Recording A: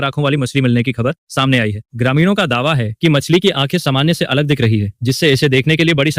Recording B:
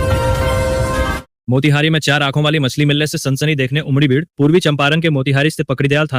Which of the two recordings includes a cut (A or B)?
B